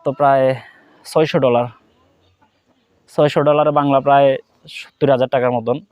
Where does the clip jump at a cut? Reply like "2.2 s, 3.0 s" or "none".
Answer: none